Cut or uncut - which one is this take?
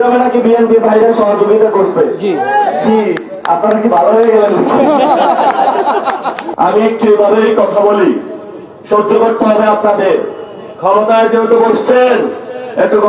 cut